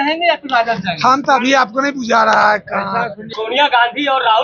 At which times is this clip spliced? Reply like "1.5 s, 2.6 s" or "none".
3.2 s